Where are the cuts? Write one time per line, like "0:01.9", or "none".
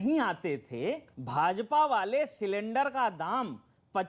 0:01.1